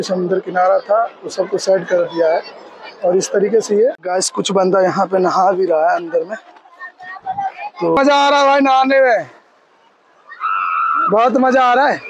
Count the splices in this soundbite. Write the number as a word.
two